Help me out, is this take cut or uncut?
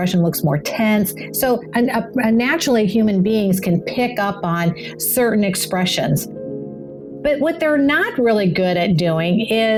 uncut